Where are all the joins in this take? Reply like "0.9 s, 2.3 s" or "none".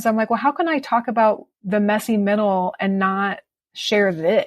1.5 s